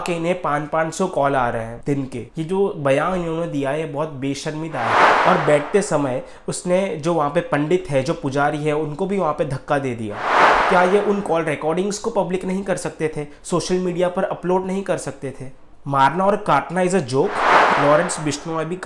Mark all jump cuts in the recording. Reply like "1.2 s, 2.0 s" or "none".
5.0 s, 10.4 s, 17.6 s